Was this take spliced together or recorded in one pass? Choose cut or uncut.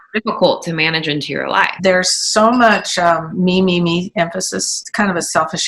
cut